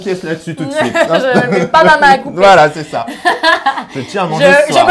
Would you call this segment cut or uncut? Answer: uncut